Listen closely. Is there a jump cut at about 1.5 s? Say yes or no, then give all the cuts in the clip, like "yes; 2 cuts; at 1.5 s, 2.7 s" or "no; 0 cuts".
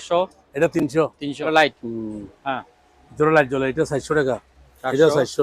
yes; 1 cut; at 1.5 s